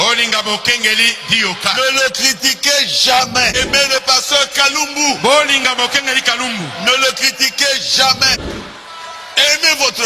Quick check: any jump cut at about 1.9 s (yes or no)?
no